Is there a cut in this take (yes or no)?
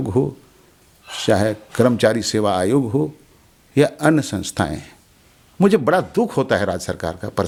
no